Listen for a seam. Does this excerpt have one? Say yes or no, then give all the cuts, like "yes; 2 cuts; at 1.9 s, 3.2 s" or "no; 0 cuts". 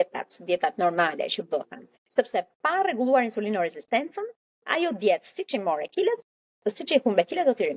no; 0 cuts